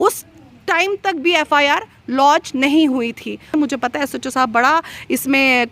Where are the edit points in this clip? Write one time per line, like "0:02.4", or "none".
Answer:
0:03.5